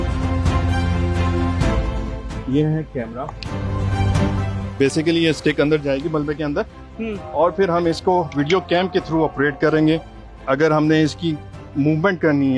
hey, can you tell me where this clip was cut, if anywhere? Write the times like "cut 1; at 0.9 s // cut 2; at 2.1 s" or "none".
none